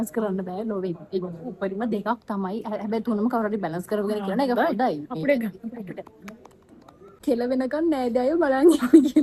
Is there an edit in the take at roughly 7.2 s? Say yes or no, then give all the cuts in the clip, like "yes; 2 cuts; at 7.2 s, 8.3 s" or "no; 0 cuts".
yes; 1 cut; at 7.2 s